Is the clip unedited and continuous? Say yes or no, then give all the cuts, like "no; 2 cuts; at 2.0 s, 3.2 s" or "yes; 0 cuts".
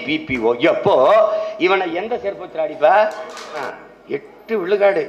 no; 1 cut; at 3.7 s